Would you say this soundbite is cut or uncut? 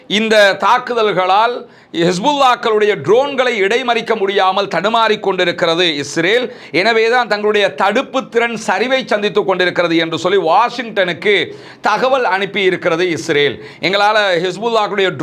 uncut